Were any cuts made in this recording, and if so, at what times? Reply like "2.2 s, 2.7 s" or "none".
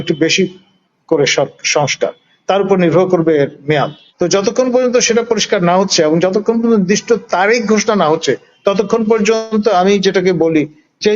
4.0 s